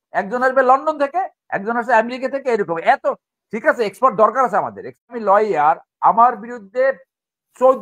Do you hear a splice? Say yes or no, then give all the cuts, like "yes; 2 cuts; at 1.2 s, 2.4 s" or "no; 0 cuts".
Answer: yes; 1 cut; at 5.1 s